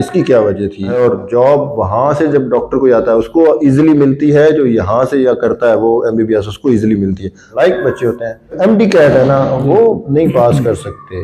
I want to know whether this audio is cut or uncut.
cut